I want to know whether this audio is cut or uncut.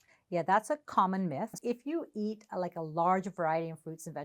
cut